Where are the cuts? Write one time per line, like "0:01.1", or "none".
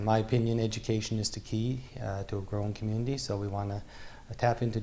none